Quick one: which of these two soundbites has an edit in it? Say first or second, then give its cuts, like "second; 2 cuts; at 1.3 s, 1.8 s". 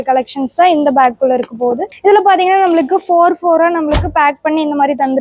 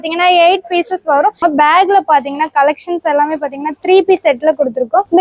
second; 1 cut; at 1.4 s